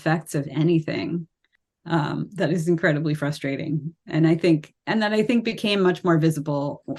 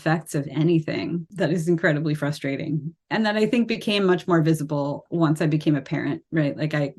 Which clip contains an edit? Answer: second; 3 cuts; at 1.3 s, 3.0 s, 5.0 s

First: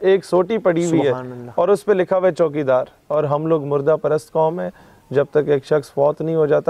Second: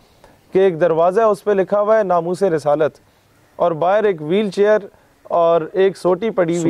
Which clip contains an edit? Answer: first; 1 cut; at 3.0 s

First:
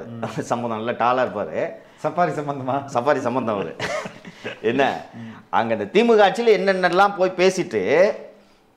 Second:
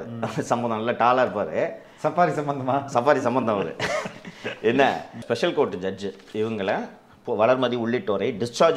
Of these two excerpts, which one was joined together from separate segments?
second; 1 cut; at 5.2 s

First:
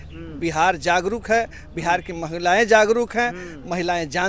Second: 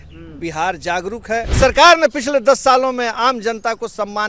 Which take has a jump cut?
second; 1 cut; at 1.5 s

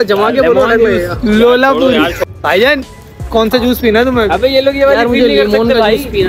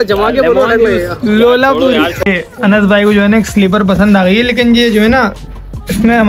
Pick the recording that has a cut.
second; 1 cut; at 2.2 s

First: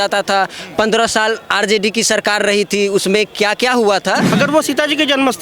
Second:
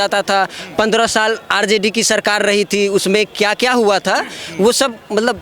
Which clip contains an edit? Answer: first; 1 cut; at 4.3 s

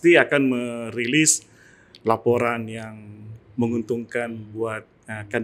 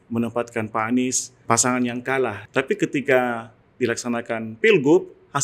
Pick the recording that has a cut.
second; 2 cuts; at 1.3 s, 2.4 s

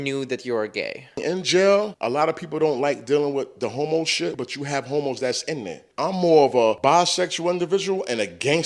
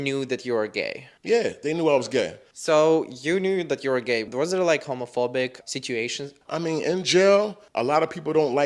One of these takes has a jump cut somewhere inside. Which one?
first; 5 cuts; at 1.2 s, 2.0 s, 4.3 s, 5.8 s, 6.8 s

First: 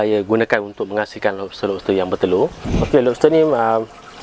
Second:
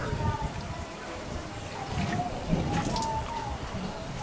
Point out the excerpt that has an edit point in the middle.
first; 1 cut; at 2.6 s

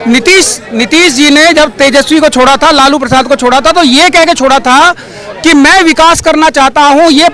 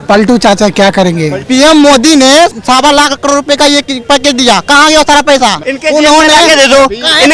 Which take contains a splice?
second; 3 cuts; at 1.4 s, 2.6 s, 5.7 s

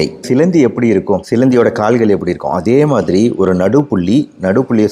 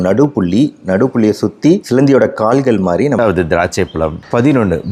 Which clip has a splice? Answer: second; 1 cut; at 3.2 s

